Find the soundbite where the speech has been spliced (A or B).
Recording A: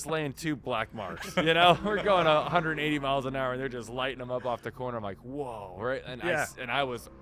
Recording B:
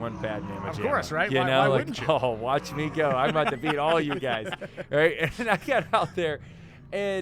B